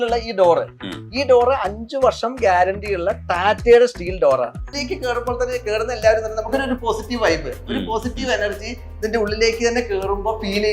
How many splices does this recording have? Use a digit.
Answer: 1